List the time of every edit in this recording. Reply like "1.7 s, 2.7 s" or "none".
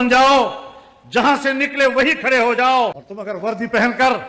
2.8 s